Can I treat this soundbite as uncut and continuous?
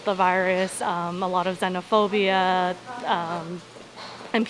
yes; 0 cuts

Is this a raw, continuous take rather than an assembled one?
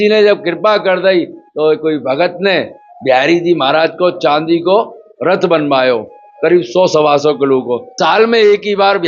no; 1 cut; at 7.9 s

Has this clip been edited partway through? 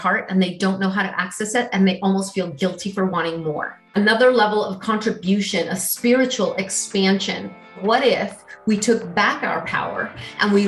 yes; 2 cuts; at 3.7 s, 7.8 s

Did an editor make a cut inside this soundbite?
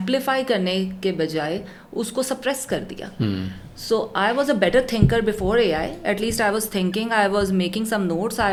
no; 0 cuts

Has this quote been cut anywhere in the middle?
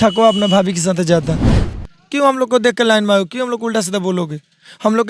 yes; 1 cut; at 1.6 s

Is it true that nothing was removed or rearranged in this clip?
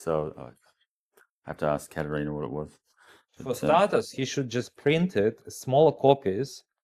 yes; 0 cuts

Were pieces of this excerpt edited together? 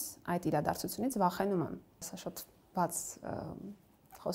no; 0 cuts

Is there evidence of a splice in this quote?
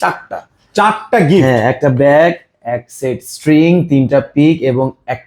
no; 0 cuts

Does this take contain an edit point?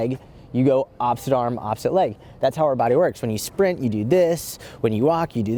no; 0 cuts

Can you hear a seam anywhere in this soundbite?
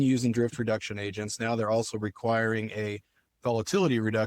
yes; 1 cut; at 3.2 s

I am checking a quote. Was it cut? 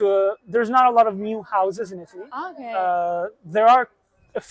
no; 0 cuts

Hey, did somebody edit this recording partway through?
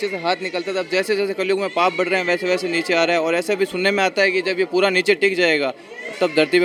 no; 0 cuts

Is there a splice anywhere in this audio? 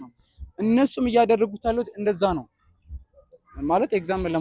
no; 0 cuts

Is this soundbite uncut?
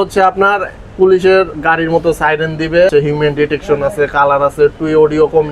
no; 1 cut; at 2.9 s

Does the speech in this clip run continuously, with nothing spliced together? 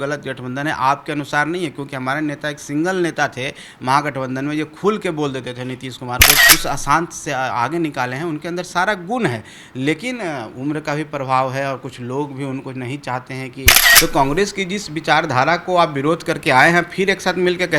no; 2 cuts; at 6.4 s, 13.8 s

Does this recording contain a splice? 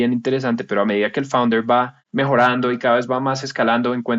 yes; 1 cut; at 2.0 s

